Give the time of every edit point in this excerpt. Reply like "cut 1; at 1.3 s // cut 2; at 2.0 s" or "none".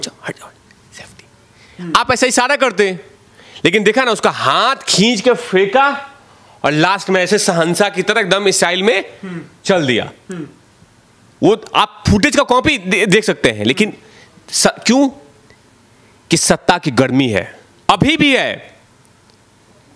none